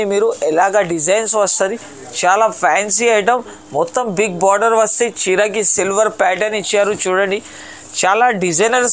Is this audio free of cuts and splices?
yes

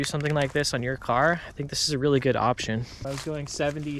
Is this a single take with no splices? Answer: no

